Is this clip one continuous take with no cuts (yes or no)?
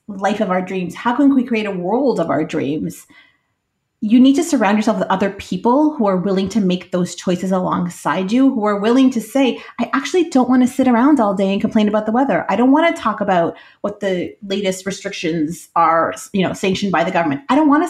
yes